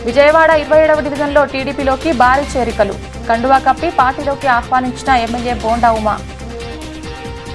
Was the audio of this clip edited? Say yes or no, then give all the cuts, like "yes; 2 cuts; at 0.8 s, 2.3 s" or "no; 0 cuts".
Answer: yes; 1 cut; at 6.5 s